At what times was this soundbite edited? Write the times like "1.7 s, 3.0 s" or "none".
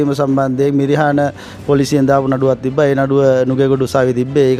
none